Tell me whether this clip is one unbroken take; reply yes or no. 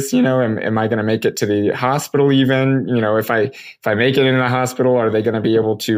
yes